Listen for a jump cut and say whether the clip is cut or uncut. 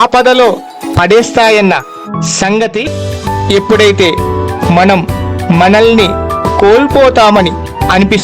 cut